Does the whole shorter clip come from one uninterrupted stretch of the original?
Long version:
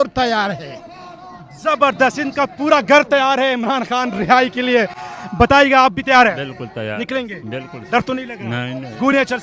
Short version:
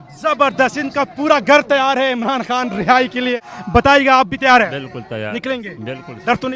no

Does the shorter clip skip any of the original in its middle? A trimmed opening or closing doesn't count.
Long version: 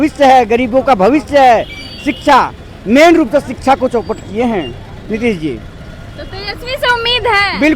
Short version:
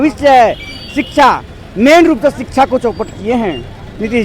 no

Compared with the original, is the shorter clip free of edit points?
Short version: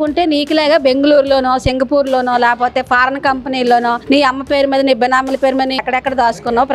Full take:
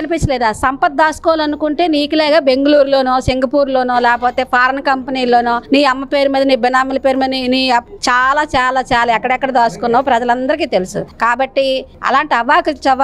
no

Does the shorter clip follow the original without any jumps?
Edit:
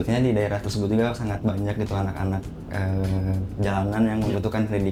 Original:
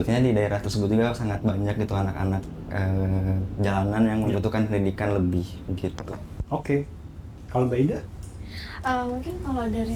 yes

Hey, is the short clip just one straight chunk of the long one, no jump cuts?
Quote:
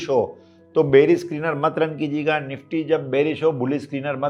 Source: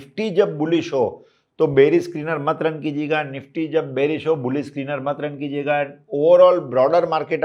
yes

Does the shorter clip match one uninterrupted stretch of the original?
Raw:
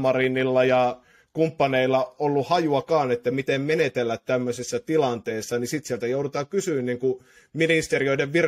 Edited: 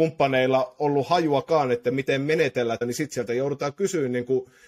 no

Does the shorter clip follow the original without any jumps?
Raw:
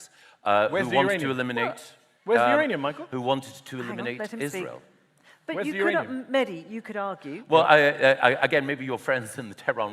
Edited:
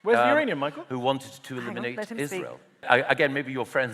no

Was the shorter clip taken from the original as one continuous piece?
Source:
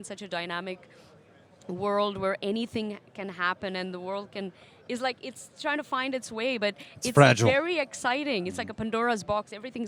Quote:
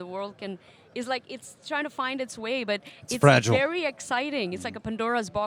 yes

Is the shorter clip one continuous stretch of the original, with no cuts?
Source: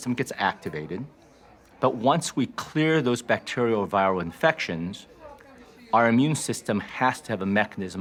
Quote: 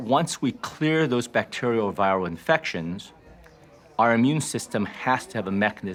yes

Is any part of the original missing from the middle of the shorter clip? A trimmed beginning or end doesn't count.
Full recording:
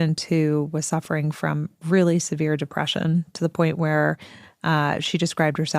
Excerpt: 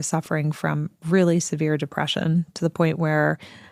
no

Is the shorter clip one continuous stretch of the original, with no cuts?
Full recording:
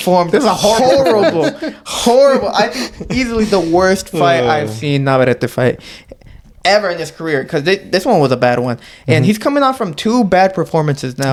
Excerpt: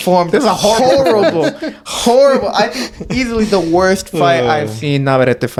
yes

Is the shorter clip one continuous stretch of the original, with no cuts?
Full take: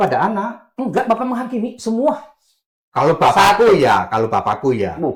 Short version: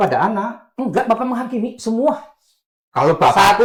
yes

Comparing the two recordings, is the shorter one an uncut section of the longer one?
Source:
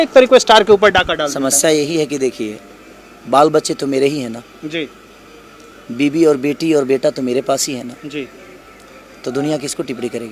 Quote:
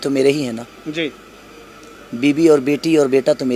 yes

